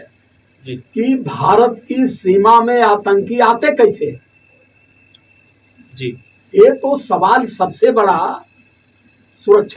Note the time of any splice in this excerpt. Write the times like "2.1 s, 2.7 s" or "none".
none